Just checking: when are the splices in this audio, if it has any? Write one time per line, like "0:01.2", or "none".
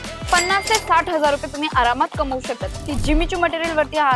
0:02.9